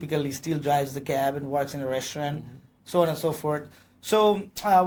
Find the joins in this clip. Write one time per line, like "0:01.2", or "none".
none